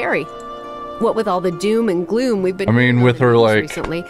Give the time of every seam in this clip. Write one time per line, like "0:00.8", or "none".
0:02.6